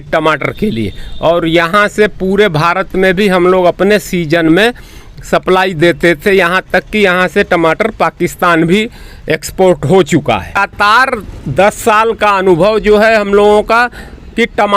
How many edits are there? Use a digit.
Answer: 1